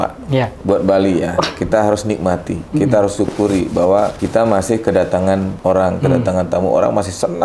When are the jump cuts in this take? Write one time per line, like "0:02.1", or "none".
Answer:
0:04.2
0:05.5